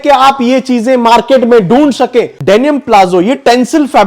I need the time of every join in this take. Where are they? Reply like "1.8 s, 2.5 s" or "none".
2.3 s

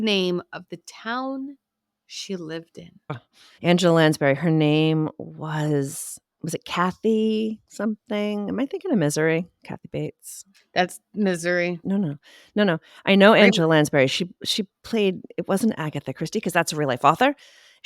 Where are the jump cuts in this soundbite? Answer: 3.1 s, 11.8 s

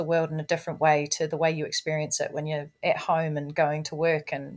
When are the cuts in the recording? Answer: none

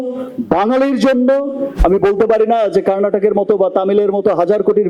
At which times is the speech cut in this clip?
1.7 s

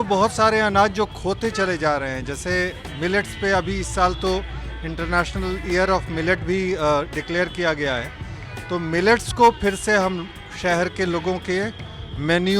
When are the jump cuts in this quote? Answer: none

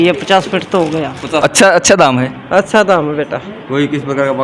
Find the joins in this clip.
1.4 s

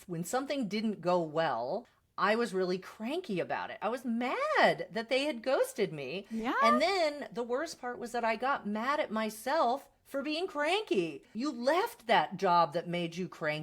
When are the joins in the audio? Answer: 2.0 s, 11.3 s

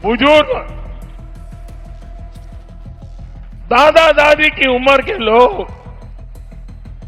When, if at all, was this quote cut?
1.3 s, 3.6 s

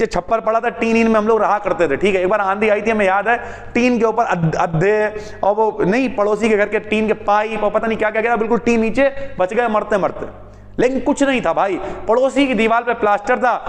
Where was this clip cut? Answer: none

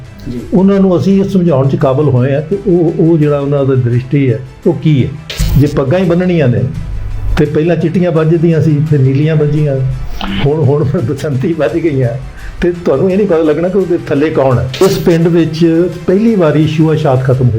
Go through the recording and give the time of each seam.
5.4 s, 14.8 s

